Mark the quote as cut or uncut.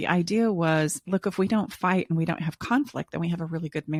uncut